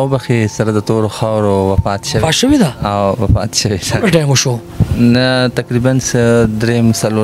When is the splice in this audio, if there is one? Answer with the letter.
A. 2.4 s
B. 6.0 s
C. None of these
C